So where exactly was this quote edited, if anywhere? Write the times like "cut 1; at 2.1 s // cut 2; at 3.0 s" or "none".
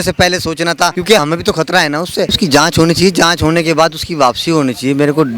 cut 1; at 1.1 s // cut 2; at 2.3 s